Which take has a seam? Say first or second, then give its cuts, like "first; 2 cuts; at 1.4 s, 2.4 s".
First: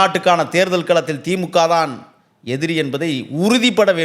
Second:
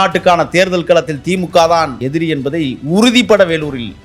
second; 1 cut; at 2.0 s